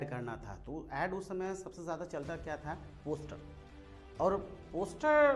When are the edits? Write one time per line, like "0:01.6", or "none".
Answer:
none